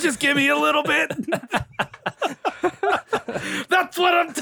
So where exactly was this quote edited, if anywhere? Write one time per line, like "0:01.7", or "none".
none